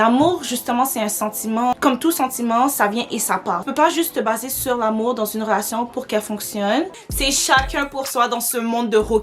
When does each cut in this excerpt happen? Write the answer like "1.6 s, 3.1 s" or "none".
7.0 s